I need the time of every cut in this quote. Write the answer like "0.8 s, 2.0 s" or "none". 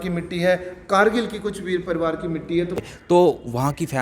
2.8 s